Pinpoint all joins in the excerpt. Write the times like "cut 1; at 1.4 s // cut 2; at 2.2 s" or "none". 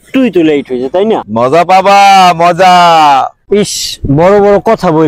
cut 1; at 1.3 s